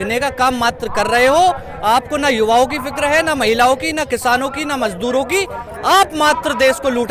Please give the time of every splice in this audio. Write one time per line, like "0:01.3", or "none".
none

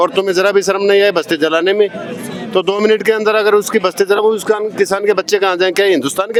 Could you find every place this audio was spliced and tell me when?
none

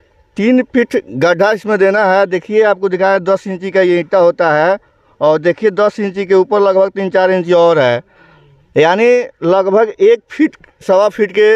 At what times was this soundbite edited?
none

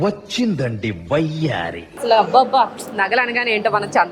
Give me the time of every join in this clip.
0:02.0

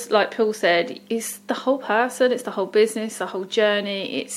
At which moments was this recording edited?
0:01.0

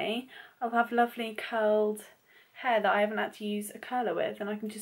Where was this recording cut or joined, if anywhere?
none

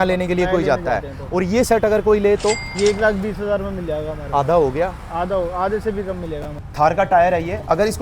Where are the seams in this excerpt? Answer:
0:06.6

